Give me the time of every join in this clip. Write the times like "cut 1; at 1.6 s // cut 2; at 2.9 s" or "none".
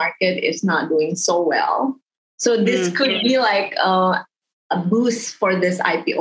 none